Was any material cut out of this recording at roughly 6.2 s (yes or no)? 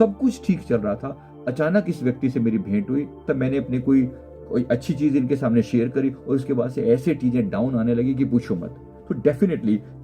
no